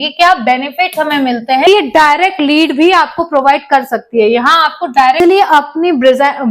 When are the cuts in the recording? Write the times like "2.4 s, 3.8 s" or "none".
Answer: 1.7 s, 5.2 s